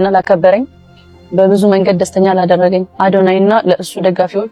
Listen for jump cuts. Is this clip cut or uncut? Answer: uncut